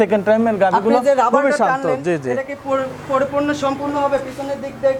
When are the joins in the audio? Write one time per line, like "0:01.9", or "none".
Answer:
none